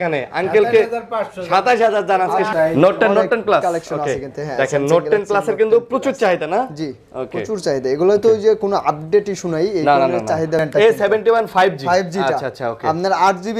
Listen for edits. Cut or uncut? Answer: cut